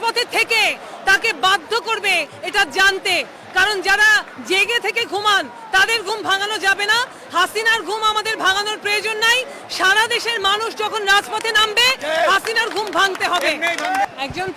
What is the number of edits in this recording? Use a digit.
0